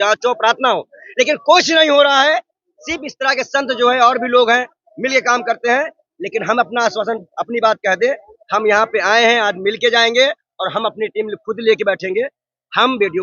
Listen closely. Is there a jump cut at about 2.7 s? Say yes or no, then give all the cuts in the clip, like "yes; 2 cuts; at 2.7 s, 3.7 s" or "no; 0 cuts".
no; 0 cuts